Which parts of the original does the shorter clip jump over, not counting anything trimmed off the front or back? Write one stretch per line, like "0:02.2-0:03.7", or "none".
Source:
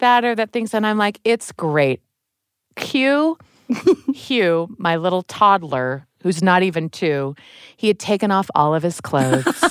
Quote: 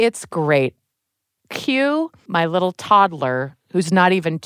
0:03.5-0:04.7